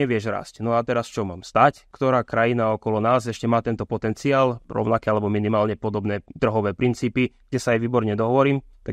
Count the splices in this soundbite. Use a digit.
2